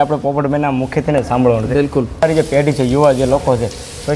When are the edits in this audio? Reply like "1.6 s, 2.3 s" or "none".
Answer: 2.2 s